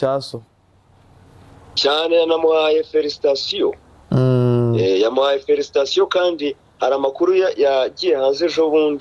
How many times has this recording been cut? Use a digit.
0